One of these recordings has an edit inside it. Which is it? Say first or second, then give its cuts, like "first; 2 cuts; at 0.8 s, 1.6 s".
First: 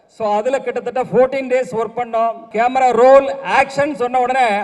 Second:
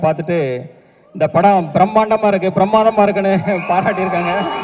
first; 1 cut; at 2.4 s